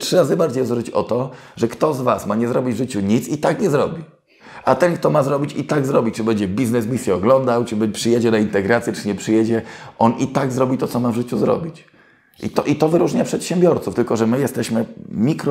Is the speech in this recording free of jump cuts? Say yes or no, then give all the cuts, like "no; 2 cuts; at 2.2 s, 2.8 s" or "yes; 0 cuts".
yes; 0 cuts